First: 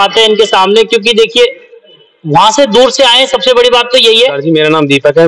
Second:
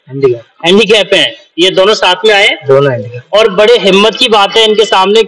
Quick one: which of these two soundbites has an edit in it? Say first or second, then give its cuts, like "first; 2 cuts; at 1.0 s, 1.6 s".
first; 1 cut; at 4.4 s